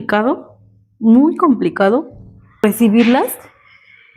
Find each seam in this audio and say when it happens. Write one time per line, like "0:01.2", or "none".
0:02.6